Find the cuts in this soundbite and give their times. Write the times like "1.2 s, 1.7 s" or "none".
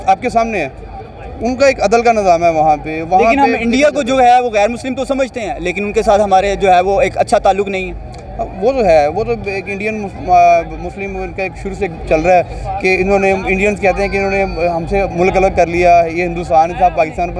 none